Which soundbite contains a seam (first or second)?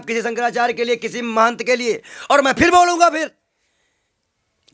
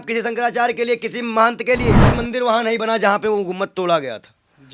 second